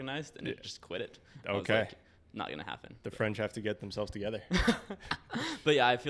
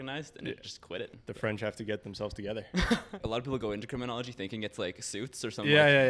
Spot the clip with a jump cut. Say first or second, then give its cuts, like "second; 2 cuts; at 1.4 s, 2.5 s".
second; 2 cuts; at 1.2 s, 3.2 s